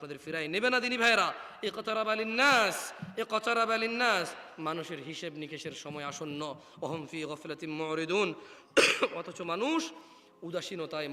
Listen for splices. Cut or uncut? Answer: uncut